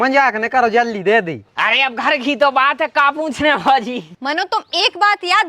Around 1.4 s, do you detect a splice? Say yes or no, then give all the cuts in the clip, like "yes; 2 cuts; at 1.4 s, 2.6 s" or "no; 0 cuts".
yes; 2 cuts; at 1.4 s, 4.1 s